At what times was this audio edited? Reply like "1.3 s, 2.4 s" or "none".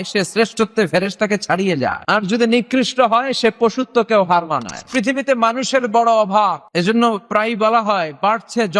2.0 s, 4.9 s, 6.6 s